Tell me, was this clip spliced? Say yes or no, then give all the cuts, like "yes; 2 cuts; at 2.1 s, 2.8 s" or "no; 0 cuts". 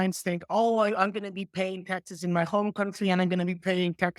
no; 0 cuts